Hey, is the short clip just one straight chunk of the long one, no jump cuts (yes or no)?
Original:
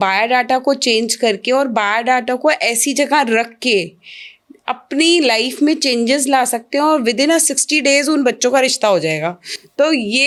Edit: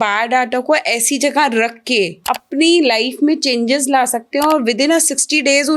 no